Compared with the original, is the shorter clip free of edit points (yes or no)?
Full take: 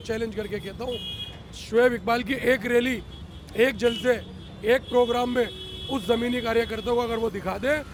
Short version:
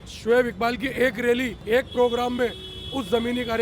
no